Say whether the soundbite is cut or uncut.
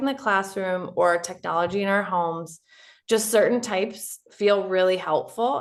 uncut